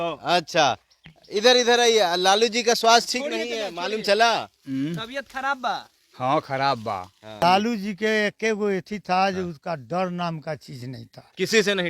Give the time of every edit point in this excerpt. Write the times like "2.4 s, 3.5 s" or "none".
7.4 s